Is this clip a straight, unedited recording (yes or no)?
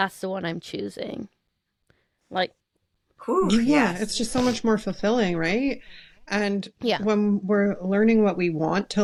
yes